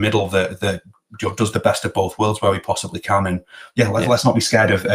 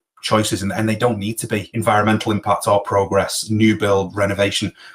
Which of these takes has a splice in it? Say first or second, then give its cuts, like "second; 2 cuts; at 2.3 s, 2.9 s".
second; 1 cut; at 1.7 s